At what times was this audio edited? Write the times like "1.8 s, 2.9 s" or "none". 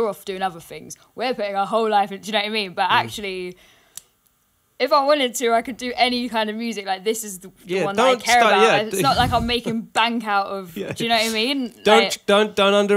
none